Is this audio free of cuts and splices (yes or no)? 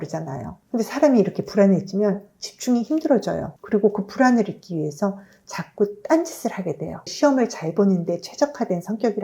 no